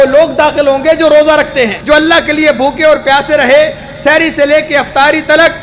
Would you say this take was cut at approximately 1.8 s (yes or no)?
yes